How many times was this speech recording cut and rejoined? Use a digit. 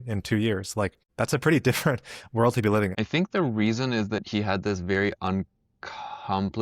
2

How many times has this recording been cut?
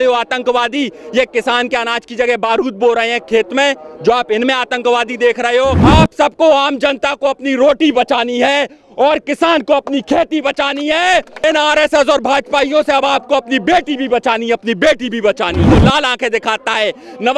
3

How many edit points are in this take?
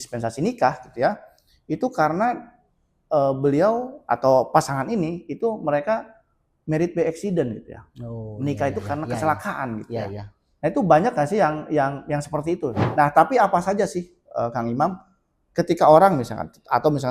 1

